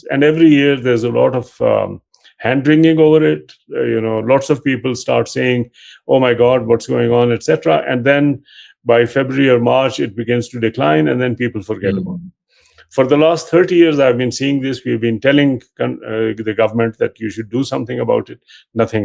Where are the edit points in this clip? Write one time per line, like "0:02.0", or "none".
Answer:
none